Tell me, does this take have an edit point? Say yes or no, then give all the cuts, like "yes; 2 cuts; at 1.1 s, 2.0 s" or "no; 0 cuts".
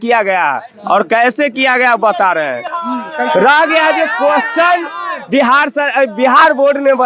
no; 0 cuts